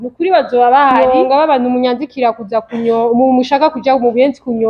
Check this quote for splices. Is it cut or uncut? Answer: cut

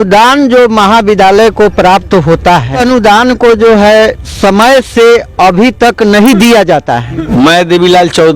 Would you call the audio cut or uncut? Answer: cut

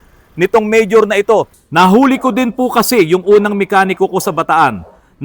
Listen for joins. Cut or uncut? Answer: cut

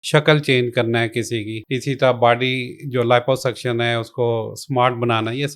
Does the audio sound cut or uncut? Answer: cut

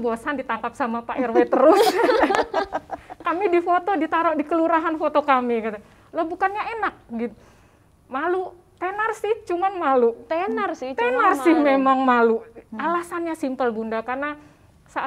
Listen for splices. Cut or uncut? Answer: uncut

